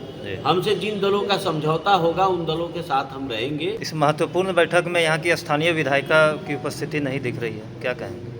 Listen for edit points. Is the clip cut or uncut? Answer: cut